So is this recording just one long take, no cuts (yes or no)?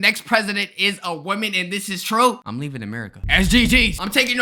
yes